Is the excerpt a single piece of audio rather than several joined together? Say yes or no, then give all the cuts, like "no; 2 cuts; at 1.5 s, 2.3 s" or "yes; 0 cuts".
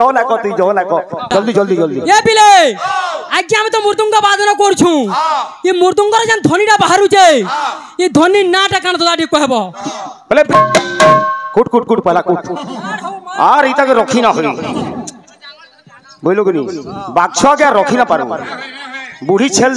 no; 2 cuts; at 1.3 s, 10.5 s